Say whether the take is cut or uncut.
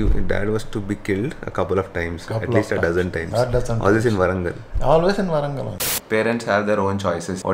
cut